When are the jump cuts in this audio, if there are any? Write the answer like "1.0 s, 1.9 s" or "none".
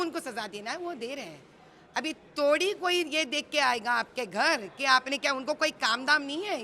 none